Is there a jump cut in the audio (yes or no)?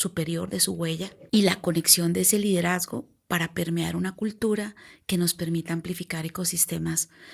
yes